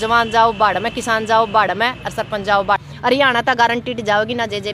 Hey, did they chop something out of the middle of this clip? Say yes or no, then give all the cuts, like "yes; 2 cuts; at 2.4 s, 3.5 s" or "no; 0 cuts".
yes; 1 cut; at 3.1 s